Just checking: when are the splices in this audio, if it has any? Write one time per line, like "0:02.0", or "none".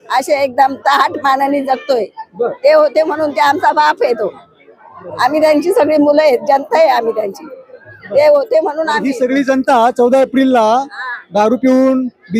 none